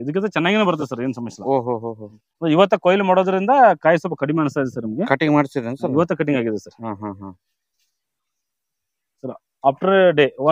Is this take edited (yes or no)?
no